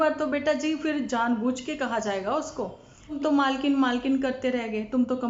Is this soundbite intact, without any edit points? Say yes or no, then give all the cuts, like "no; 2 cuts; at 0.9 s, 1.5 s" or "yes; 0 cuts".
no; 1 cut; at 3.2 s